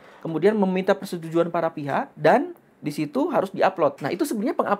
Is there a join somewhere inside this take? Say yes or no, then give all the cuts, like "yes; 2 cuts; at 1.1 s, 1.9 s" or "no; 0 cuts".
yes; 2 cuts; at 2.1 s, 4.0 s